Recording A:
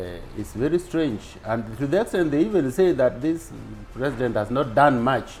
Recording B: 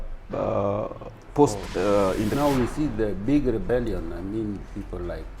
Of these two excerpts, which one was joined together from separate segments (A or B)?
B